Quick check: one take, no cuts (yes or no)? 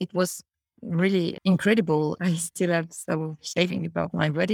no